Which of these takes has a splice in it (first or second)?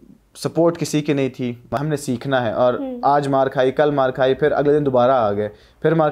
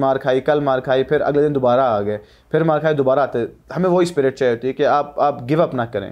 first